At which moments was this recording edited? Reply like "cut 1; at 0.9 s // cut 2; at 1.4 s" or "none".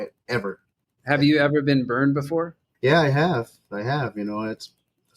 cut 1; at 0.9 s // cut 2; at 2.6 s